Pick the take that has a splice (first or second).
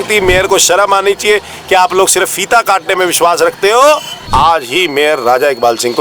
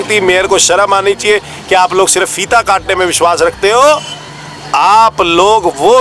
first